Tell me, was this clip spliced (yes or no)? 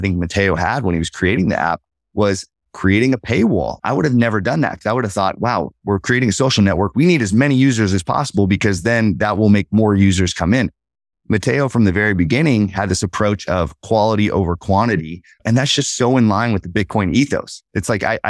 yes